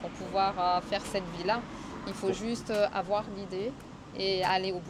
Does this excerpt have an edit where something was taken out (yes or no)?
no